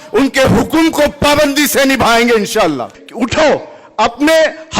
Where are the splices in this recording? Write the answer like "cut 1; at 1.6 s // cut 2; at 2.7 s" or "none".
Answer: cut 1; at 3.0 s